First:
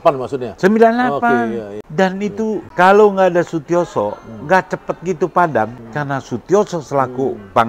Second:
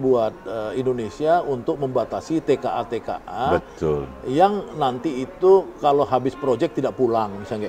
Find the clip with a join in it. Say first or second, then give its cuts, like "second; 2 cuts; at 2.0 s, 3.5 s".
first; 3 cuts; at 1.8 s, 2.7 s, 5.8 s